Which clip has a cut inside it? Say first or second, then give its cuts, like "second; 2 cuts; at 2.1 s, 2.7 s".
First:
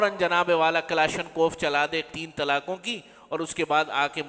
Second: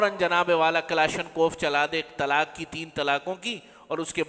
first; 1 cut; at 2.1 s